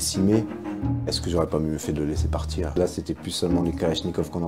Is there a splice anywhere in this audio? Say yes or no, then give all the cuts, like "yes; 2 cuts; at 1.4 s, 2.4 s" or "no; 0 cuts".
yes; 1 cut; at 2.8 s